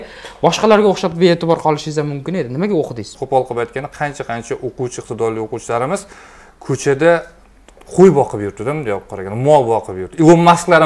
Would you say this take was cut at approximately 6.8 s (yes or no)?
no